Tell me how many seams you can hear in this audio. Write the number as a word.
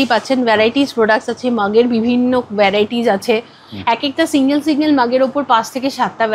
zero